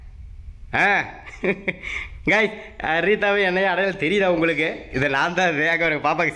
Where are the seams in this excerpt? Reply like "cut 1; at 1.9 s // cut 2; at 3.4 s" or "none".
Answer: none